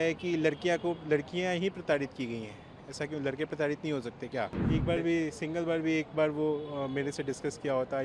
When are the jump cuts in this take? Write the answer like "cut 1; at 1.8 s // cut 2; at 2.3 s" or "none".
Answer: cut 1; at 4.6 s

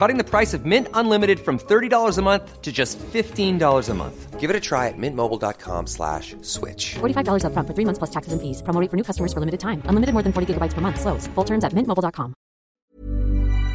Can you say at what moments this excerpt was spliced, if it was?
cut 1; at 12.8 s

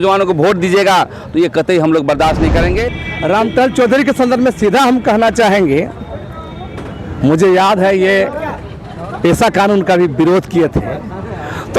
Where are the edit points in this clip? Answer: cut 1; at 3.0 s

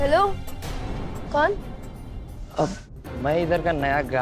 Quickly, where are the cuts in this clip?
none

